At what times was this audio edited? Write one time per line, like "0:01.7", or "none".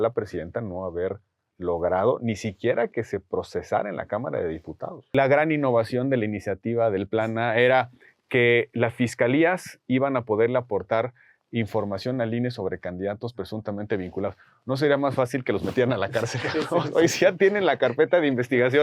0:05.1

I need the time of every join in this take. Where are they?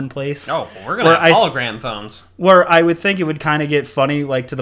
none

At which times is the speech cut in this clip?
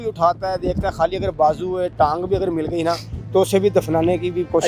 none

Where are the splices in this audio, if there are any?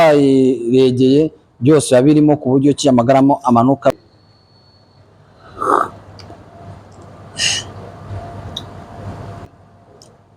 0:03.9
0:09.5

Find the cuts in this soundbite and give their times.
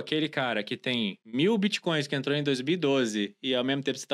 0:01.2

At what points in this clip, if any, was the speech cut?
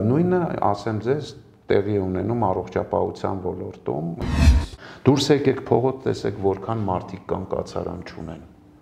0:04.4

